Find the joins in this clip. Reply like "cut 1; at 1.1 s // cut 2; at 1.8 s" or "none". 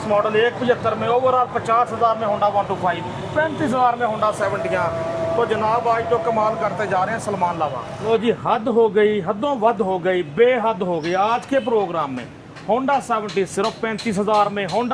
cut 1; at 7.9 s

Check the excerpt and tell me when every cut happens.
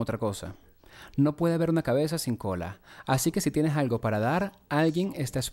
none

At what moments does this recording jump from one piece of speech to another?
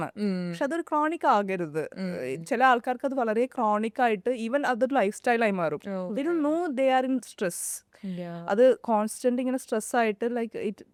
none

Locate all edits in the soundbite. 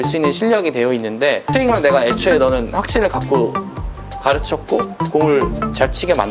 cut 1; at 1.5 s

